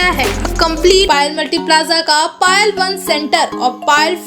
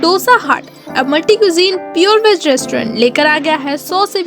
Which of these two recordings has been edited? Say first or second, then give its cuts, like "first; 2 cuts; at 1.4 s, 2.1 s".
first; 1 cut; at 1.1 s